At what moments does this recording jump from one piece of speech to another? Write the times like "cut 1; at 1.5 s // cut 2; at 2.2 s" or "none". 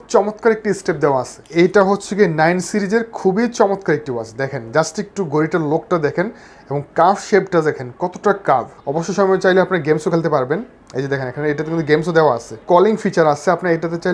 cut 1; at 1.4 s // cut 2; at 8.8 s